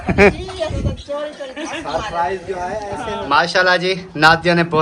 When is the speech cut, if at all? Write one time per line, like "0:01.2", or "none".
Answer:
0:03.2